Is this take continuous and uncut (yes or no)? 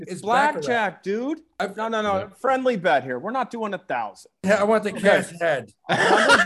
no